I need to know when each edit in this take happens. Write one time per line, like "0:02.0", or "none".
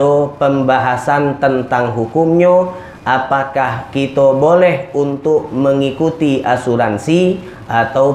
none